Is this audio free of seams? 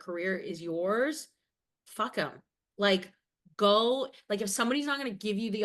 yes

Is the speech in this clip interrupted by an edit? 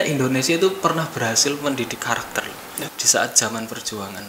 yes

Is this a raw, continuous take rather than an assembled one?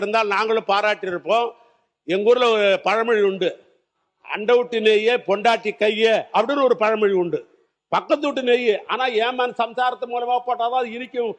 yes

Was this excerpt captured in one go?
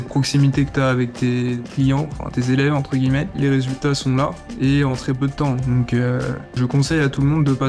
no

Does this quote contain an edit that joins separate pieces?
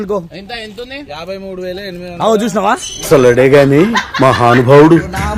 no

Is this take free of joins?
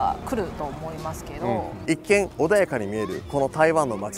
no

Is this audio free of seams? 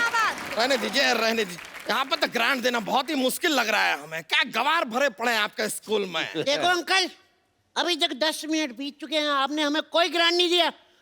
no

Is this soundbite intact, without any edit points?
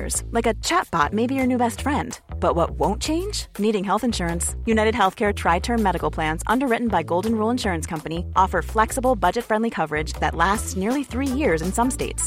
yes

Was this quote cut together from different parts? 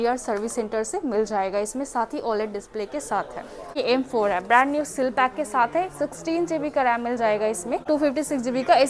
yes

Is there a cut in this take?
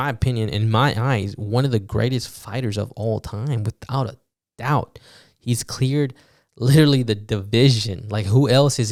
no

